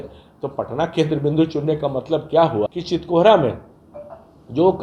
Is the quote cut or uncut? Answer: cut